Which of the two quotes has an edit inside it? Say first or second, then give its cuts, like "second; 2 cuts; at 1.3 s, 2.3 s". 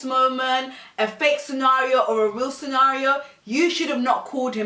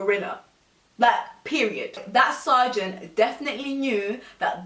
second; 1 cut; at 2.0 s